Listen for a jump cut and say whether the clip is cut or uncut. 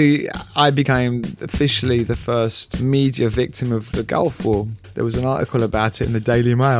cut